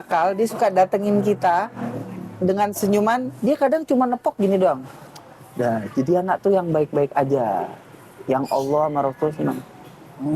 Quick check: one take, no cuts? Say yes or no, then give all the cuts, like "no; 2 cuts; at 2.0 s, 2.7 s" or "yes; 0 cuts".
no; 1 cut; at 3.3 s